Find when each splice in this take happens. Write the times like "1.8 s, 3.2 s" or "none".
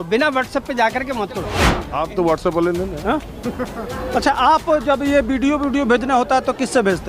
1.8 s